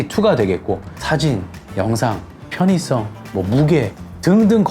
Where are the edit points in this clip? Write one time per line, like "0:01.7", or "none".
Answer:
0:01.0
0:03.2

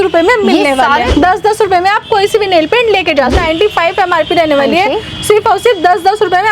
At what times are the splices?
0:01.0
0:03.4

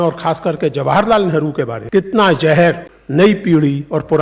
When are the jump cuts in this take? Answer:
0:01.8
0:02.9

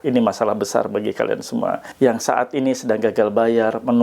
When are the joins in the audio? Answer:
0:01.9

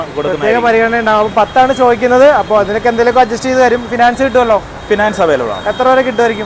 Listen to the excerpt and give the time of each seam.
none

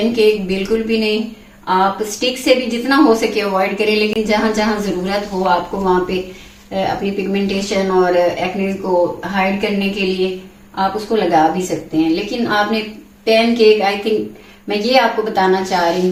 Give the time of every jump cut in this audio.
none

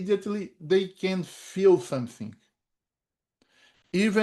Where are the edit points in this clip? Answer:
none

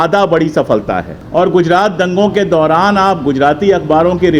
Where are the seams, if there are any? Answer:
0:01.1

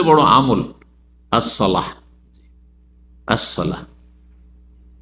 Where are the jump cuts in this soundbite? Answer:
none

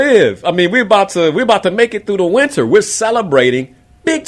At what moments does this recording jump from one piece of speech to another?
none

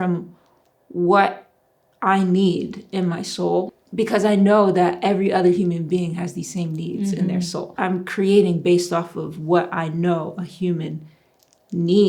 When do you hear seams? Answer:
0:03.7
0:07.7

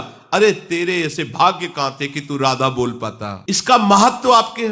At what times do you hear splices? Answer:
0:03.3

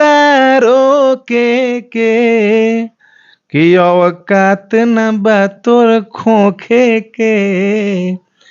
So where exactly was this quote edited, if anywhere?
none

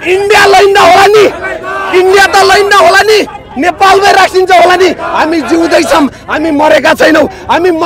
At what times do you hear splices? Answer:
none

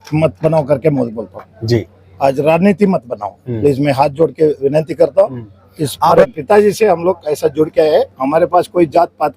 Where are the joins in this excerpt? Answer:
0:06.1

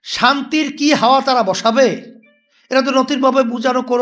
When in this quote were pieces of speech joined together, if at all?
none

